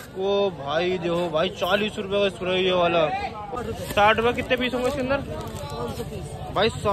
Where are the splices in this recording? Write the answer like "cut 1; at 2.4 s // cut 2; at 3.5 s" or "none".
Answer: cut 1; at 3.4 s